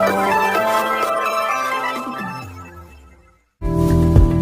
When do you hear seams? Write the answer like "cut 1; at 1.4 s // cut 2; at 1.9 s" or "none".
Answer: cut 1; at 3.3 s